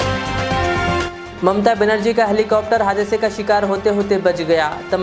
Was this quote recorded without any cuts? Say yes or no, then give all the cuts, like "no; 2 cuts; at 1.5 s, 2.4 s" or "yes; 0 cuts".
no; 1 cut; at 1.0 s